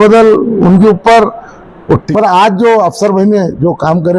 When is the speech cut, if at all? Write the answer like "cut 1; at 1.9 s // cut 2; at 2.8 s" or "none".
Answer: cut 1; at 2.1 s